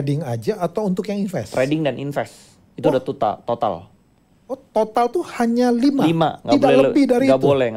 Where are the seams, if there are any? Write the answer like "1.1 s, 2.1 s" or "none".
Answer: none